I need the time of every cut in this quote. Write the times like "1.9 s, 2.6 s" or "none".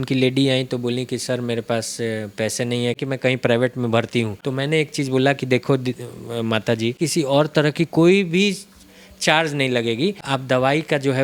3.0 s, 4.4 s, 7.0 s, 10.2 s